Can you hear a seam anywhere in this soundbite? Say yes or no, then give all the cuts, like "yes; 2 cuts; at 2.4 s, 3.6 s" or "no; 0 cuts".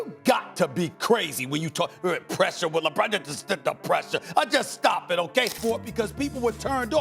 yes; 1 cut; at 5.6 s